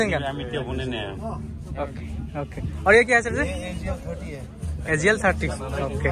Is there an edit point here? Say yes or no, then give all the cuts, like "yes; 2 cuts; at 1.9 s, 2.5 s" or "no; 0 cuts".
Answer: no; 0 cuts